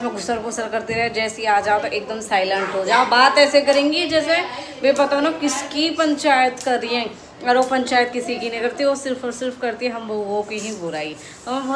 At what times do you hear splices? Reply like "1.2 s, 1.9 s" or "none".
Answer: none